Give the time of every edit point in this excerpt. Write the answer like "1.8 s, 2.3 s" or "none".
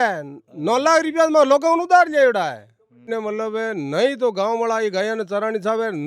3.1 s